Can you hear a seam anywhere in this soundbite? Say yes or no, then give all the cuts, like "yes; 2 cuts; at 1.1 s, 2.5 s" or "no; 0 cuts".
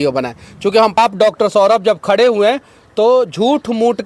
yes; 1 cut; at 1.0 s